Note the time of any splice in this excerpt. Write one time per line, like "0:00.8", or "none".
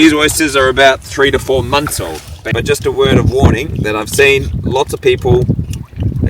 0:02.5